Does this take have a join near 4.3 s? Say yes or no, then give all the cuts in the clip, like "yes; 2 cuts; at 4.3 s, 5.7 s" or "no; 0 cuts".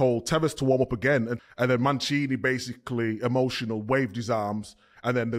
no; 1 cut; at 1.4 s